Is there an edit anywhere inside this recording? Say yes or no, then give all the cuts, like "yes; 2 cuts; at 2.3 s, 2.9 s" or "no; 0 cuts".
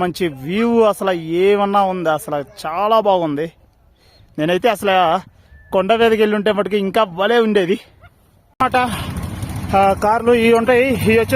yes; 1 cut; at 8.6 s